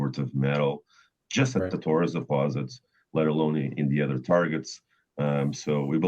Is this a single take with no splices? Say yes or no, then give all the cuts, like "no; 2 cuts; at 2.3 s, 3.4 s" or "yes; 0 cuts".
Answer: yes; 0 cuts